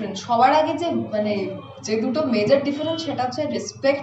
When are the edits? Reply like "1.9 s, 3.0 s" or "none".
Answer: none